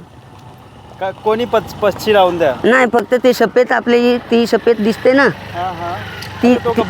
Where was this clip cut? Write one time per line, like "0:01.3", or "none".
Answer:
none

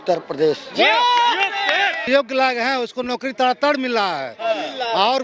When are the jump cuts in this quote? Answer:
0:02.0

